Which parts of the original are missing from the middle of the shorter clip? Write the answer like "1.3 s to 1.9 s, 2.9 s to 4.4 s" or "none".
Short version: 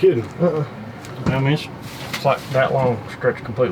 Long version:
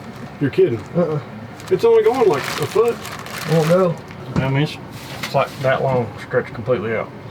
1.5 s to 4.1 s